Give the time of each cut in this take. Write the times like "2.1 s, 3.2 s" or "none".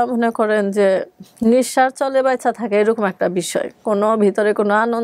none